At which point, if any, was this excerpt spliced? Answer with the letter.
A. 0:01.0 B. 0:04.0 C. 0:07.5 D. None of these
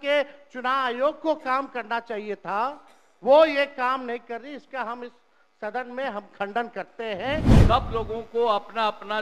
C